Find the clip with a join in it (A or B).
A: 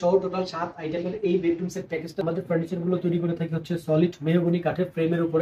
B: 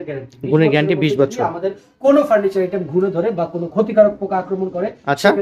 A